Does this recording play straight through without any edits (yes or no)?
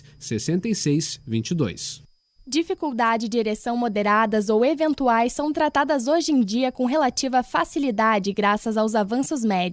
no